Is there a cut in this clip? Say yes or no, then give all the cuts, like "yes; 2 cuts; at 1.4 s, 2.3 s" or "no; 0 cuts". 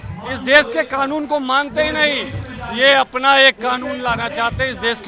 no; 0 cuts